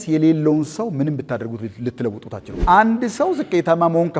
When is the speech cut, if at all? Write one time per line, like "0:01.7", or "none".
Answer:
0:02.5